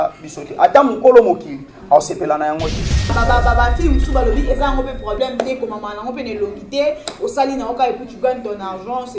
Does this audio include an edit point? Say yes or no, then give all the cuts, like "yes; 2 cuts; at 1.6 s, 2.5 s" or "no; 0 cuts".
yes; 1 cut; at 3.2 s